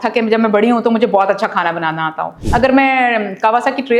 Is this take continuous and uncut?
no; 1 cut; at 2.3 s

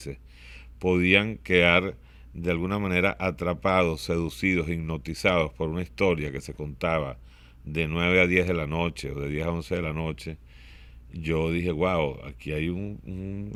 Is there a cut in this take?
no; 0 cuts

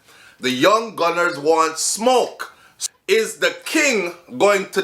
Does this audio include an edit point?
yes; 1 cut; at 2.7 s

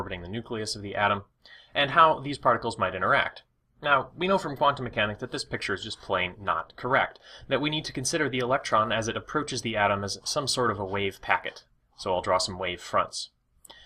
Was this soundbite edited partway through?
no; 0 cuts

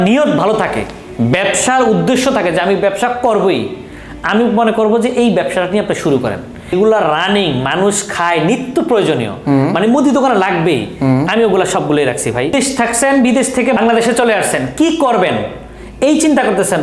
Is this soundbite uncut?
no; 3 cuts; at 6.7 s, 12.5 s, 13.8 s

